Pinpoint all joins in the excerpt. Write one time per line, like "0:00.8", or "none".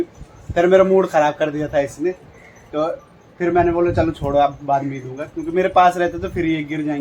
none